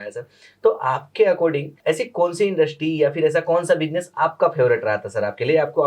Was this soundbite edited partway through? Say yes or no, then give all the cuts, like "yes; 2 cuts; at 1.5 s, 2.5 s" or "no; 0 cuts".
yes; 1 cut; at 1.7 s